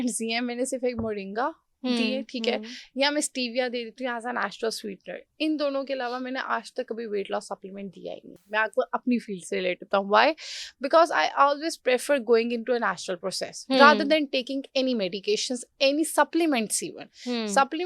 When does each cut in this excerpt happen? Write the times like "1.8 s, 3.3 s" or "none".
none